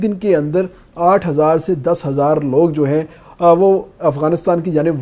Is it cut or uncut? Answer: uncut